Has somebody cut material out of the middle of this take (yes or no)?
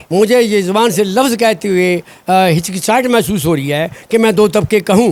no